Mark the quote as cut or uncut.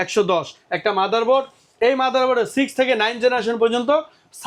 uncut